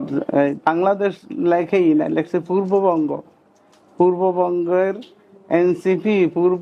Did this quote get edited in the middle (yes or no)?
no